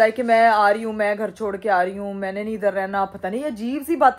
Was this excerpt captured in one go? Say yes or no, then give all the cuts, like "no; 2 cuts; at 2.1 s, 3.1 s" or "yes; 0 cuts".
yes; 0 cuts